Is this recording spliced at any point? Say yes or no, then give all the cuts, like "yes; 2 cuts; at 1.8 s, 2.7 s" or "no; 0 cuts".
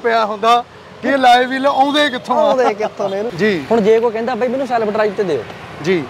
yes; 1 cut; at 3.3 s